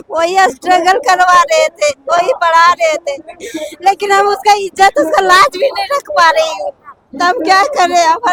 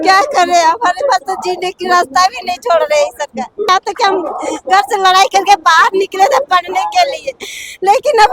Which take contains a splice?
second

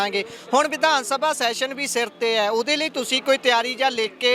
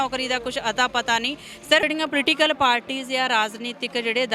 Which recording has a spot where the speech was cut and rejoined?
second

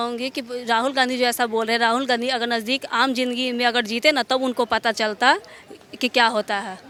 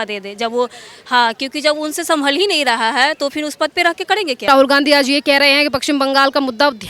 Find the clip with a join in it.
second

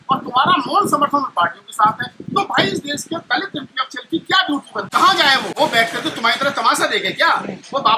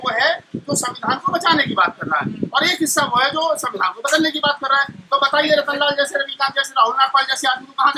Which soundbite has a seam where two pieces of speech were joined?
first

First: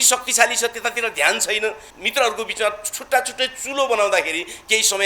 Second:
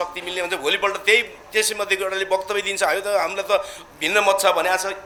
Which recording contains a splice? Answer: first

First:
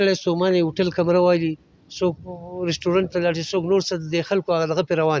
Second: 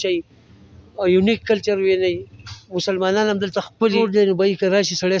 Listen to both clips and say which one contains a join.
second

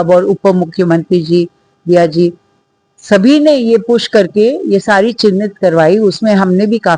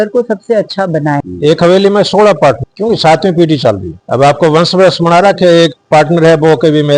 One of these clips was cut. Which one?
second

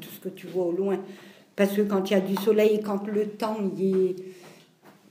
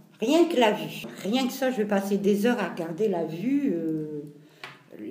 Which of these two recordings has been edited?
second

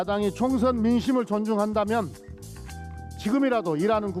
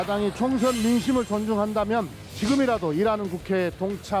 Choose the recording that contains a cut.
second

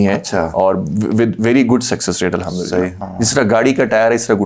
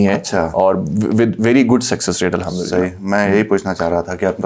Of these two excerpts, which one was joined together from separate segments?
first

